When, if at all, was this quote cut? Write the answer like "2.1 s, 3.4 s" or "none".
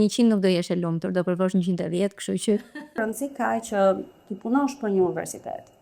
3.0 s